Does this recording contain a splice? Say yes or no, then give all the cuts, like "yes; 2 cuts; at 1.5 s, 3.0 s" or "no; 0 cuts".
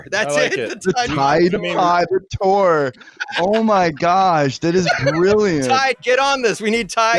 no; 0 cuts